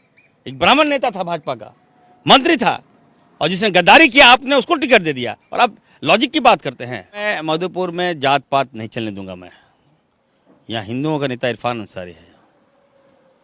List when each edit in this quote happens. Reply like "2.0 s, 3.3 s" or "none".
7.3 s